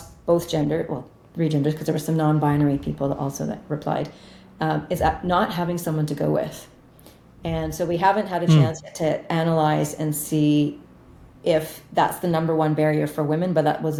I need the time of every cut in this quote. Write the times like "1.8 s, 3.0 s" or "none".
none